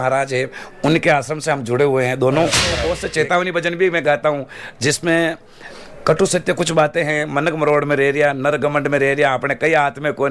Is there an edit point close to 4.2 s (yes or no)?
no